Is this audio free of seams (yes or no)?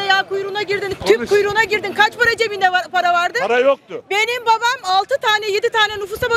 yes